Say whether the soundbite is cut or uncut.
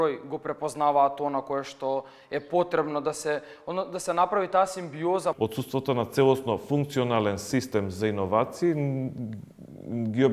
cut